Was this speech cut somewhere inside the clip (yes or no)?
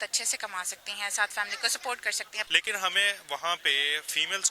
yes